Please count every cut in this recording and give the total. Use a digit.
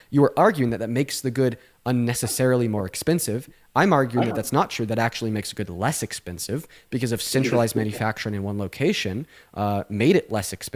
0